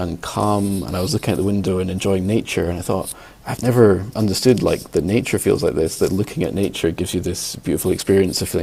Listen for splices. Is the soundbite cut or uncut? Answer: uncut